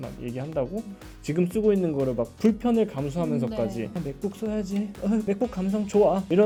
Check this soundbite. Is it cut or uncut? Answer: uncut